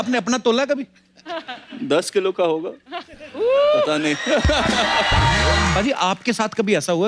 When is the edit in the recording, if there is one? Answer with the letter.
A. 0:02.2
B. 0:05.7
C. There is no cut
B